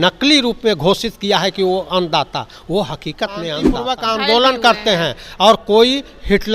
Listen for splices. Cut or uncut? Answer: cut